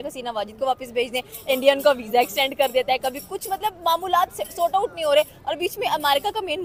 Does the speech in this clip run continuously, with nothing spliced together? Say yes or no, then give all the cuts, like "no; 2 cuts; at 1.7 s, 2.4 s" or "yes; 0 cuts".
yes; 0 cuts